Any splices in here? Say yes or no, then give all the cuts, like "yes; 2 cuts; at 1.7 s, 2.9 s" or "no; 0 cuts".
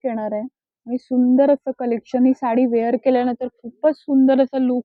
no; 0 cuts